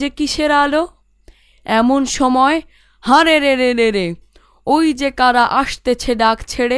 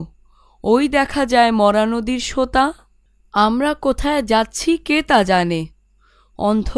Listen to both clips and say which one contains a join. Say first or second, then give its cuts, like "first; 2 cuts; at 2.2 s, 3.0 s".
second; 1 cut; at 3.3 s